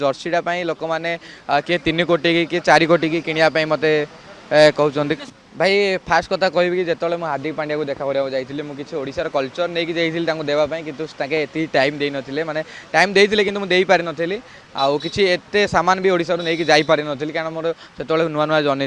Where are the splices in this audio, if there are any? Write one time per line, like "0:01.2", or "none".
0:05.2